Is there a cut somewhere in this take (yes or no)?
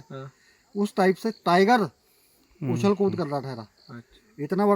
no